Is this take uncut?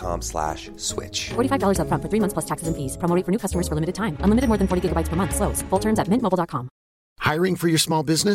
yes; 0 cuts

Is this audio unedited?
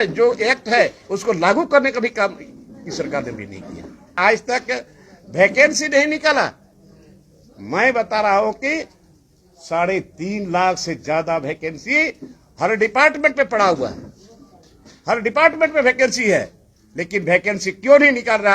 no; 1 cut; at 4.2 s

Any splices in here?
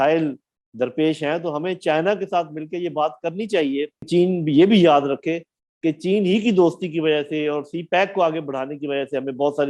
yes; 1 cut; at 4.1 s

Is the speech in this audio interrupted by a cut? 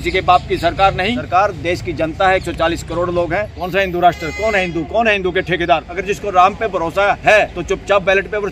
yes; 4 cuts; at 1.2 s, 3.5 s, 5.9 s, 7.6 s

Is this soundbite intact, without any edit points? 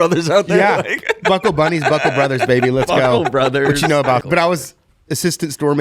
no; 1 cut; at 4.2 s

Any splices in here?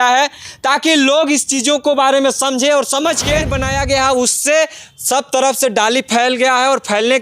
yes; 1 cut; at 3.6 s

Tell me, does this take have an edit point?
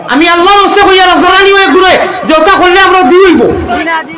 yes; 1 cut; at 1.3 s

